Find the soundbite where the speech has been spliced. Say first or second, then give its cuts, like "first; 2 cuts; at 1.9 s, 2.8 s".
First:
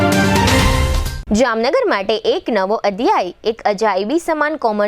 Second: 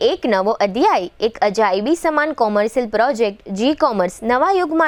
first; 1 cut; at 1.0 s